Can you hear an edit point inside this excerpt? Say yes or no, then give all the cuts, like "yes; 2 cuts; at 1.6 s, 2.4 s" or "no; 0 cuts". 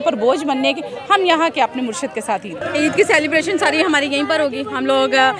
yes; 1 cut; at 2.6 s